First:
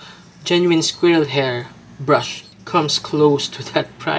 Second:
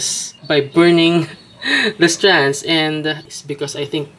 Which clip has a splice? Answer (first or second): second